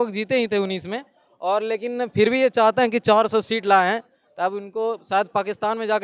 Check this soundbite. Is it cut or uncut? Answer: uncut